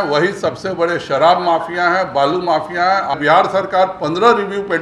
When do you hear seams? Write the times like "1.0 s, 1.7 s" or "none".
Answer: 3.1 s